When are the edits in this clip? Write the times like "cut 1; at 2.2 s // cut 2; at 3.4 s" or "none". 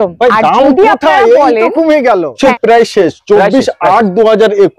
cut 1; at 2.4 s